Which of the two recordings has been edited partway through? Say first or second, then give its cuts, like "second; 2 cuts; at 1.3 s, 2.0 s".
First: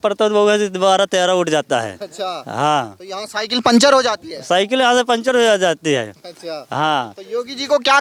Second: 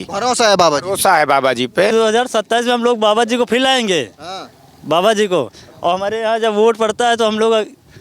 second; 1 cut; at 1.9 s